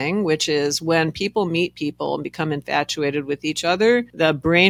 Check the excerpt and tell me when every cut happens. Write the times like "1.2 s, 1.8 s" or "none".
none